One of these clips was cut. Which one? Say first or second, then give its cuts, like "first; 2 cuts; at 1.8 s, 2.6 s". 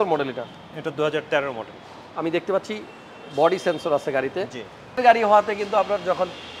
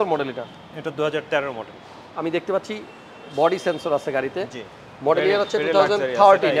first; 1 cut; at 5.0 s